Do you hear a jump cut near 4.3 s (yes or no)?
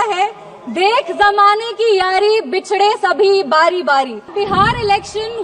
yes